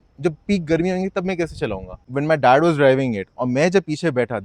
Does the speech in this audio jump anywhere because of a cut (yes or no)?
yes